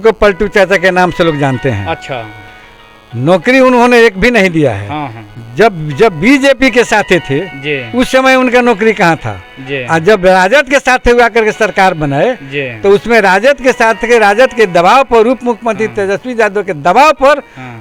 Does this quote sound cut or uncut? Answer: uncut